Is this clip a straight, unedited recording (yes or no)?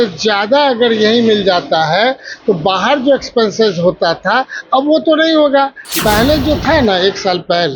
no